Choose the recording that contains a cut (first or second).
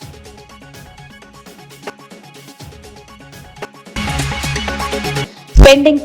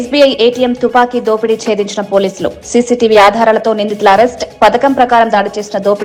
first